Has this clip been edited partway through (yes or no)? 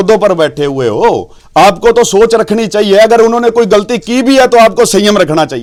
no